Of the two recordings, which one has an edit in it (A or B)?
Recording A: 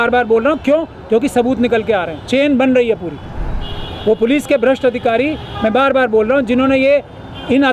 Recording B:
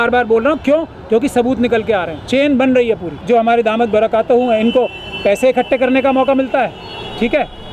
B